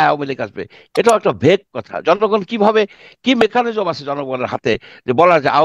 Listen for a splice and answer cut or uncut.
uncut